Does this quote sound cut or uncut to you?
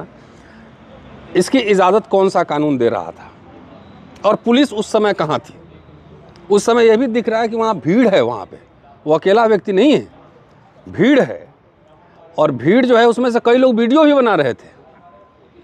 uncut